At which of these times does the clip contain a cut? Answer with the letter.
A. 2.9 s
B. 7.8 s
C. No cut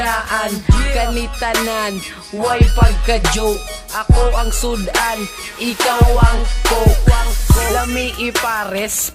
B